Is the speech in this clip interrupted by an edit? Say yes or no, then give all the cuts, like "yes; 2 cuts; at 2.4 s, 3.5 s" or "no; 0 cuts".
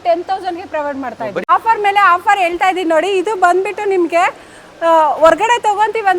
yes; 1 cut; at 1.4 s